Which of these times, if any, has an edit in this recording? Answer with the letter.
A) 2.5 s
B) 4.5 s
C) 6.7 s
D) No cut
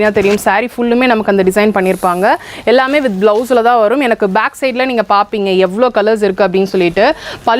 D